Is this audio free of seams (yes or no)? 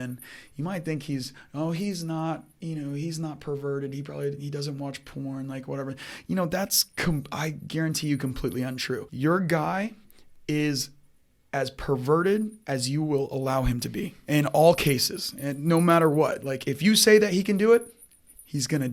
yes